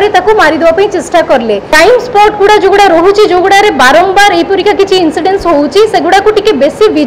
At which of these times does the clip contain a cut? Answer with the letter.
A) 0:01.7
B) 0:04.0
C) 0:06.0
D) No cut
A